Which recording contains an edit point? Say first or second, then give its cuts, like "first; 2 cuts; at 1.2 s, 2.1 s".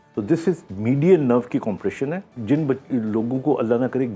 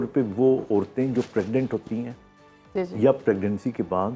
first; 1 cut; at 2.3 s